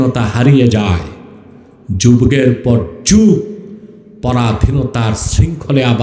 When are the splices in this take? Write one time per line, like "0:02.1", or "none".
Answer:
none